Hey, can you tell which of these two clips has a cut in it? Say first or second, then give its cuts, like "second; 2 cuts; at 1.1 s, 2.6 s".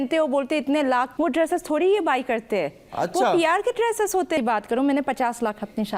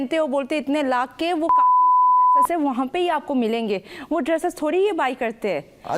first; 2 cuts; at 1.1 s, 4.4 s